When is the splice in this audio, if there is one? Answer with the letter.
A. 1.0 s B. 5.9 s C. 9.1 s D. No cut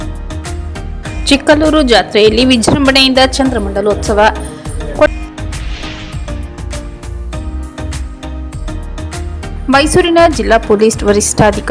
A